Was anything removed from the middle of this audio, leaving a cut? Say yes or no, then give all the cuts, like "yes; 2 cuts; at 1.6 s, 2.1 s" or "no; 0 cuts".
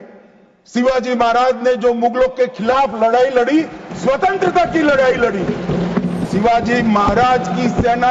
yes; 1 cut; at 6.3 s